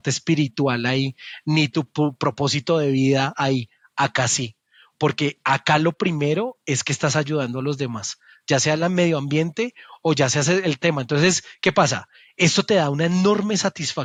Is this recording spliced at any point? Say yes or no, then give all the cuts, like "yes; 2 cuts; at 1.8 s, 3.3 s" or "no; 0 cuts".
no; 0 cuts